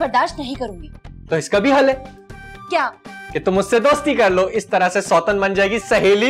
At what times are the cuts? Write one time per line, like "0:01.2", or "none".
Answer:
none